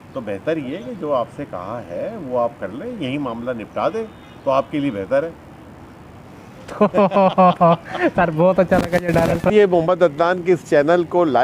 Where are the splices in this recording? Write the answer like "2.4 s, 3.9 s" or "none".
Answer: 9.5 s